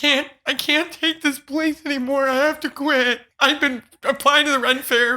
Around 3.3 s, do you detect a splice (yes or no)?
yes